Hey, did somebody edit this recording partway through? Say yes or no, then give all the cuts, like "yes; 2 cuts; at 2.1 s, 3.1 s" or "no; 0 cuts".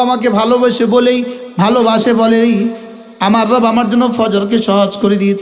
no; 0 cuts